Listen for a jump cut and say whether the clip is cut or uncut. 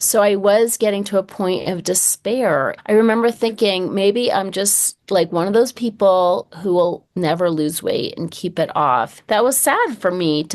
cut